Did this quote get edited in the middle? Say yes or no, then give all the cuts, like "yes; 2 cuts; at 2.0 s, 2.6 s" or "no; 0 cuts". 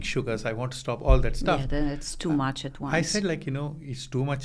no; 0 cuts